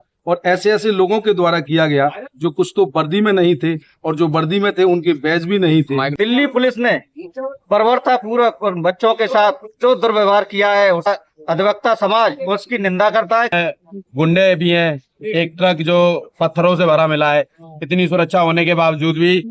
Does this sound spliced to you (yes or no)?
yes